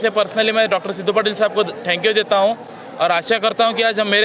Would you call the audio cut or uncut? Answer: uncut